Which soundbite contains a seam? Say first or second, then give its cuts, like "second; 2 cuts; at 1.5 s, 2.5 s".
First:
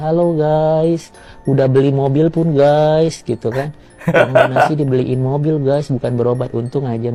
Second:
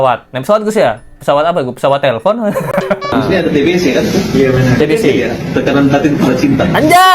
second; 1 cut; at 3.1 s